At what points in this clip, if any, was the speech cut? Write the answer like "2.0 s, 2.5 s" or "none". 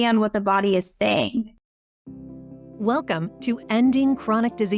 1.6 s